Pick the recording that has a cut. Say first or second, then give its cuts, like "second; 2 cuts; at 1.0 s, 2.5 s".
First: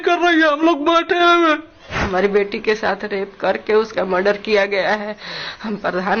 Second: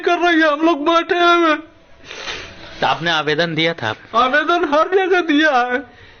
first; 1 cut; at 2.0 s